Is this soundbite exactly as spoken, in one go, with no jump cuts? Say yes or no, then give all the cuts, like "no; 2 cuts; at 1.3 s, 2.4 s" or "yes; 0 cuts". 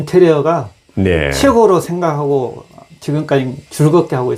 yes; 0 cuts